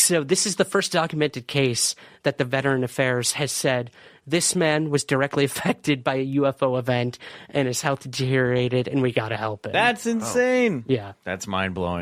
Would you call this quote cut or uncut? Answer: uncut